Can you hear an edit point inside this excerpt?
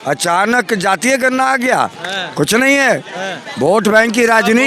no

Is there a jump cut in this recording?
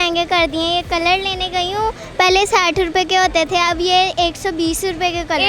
no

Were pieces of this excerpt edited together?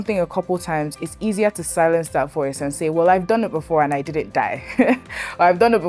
no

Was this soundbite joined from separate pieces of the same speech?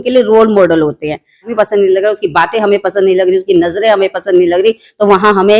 yes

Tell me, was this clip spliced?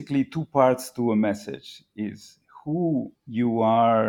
yes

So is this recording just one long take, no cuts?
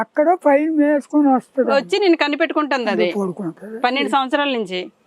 yes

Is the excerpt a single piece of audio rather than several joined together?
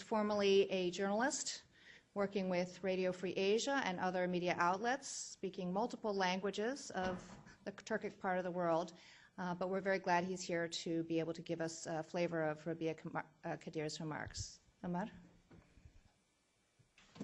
no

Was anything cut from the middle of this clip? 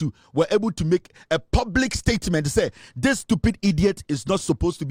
no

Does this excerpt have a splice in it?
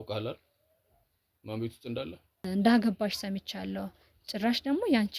yes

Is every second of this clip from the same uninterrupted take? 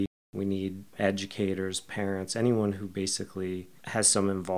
yes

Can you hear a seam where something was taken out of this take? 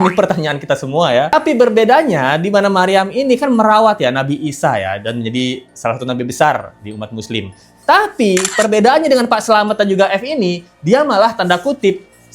no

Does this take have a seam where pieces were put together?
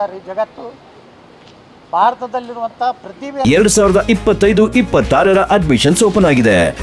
yes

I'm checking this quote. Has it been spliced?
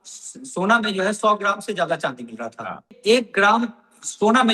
yes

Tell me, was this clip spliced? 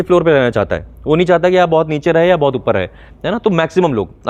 no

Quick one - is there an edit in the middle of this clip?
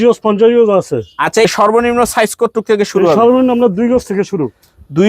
yes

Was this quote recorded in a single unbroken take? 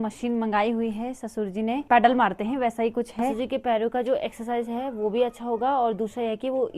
no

